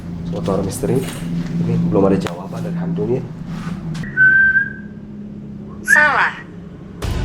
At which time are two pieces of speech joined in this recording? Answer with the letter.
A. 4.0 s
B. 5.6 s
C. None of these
A